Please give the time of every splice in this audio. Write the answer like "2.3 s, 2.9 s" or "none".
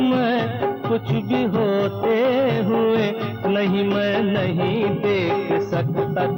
none